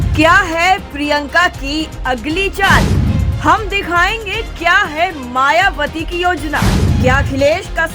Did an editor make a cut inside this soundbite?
no; 0 cuts

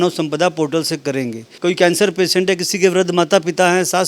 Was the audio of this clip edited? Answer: yes; 1 cut; at 1.4 s

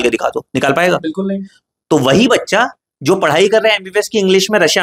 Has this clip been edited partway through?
no; 0 cuts

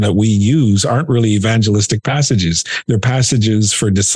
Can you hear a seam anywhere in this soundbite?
no; 0 cuts

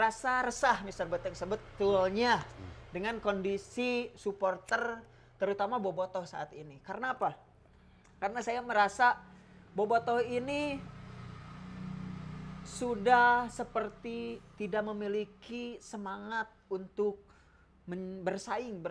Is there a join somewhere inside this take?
no; 0 cuts

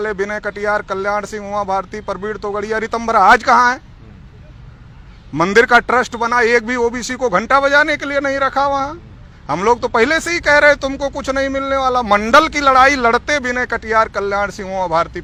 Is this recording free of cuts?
yes; 0 cuts

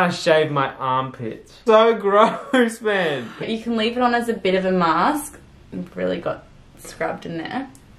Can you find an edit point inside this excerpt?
no; 0 cuts

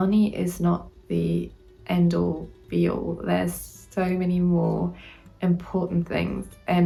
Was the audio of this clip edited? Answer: no; 0 cuts

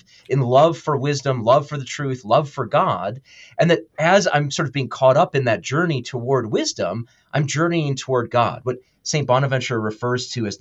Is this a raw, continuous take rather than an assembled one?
yes; 0 cuts

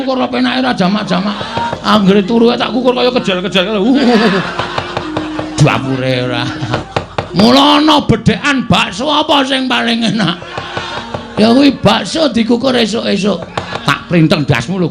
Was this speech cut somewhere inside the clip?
yes; 4 cuts; at 1.7 s, 6.7 s, 11.0 s, 13.7 s

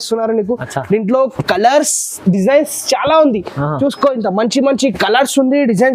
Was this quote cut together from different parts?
no; 0 cuts

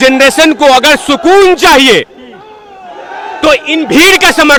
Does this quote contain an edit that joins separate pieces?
no; 0 cuts

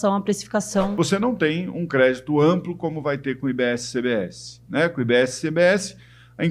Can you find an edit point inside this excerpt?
yes; 1 cut; at 0.9 s

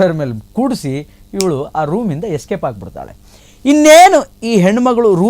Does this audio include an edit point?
no; 0 cuts

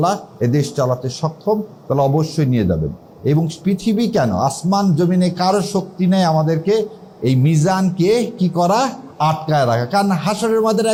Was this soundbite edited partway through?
no; 0 cuts

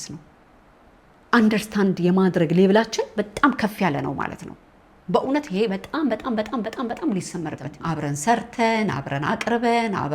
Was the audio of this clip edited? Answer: yes; 1 cut; at 7.7 s

